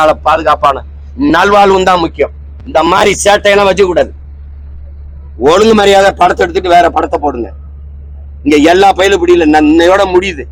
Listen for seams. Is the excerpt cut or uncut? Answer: uncut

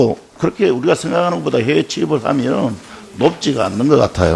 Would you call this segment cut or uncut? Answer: cut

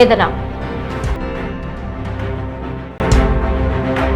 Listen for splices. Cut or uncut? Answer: cut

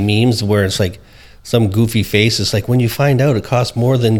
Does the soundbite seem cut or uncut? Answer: uncut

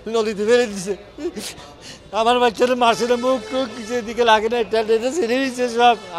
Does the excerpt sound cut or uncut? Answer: uncut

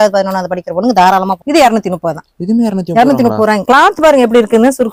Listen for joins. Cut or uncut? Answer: uncut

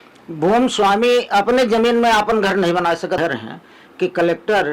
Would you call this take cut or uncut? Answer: cut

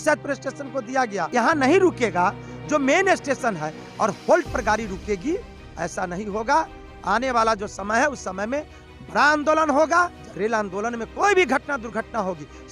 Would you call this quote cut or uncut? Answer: cut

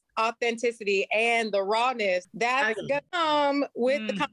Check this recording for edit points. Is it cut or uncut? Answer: cut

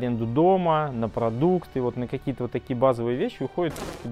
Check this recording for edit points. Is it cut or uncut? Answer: uncut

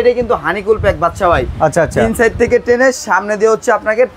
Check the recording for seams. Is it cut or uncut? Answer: uncut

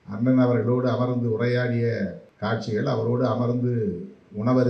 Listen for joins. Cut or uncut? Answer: cut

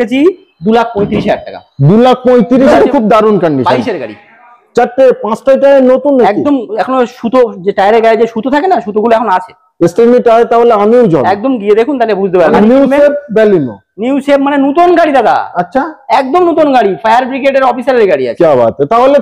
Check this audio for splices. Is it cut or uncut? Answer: cut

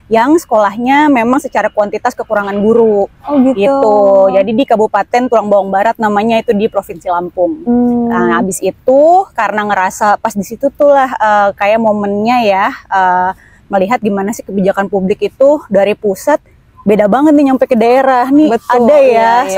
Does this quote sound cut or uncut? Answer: uncut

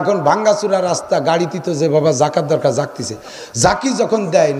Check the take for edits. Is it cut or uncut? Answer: uncut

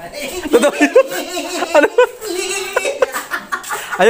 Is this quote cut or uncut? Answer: uncut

